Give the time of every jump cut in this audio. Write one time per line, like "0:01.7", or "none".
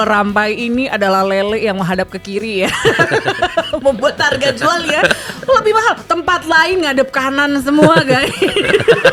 none